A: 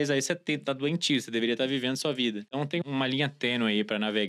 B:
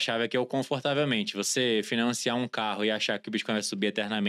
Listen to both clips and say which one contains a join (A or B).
A